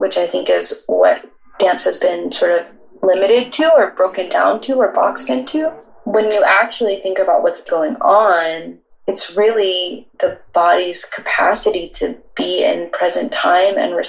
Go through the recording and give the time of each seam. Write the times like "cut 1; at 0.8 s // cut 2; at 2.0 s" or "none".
cut 1; at 5.8 s // cut 2; at 7.7 s